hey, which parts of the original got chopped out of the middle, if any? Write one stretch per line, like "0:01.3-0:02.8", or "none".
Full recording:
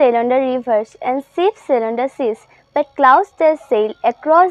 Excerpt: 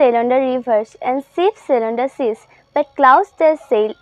none